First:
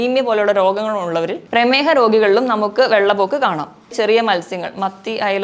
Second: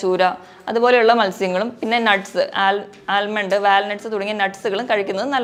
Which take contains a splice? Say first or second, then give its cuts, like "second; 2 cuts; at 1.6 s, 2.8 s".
first; 1 cut; at 3.9 s